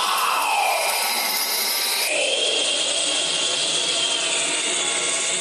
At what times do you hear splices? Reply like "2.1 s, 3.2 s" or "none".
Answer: none

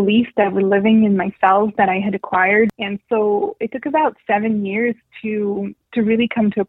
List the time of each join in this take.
2.7 s

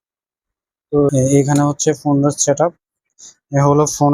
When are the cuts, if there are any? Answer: 1.1 s

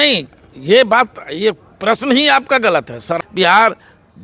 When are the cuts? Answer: 3.1 s

